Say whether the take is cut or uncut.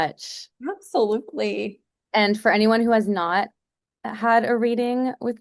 uncut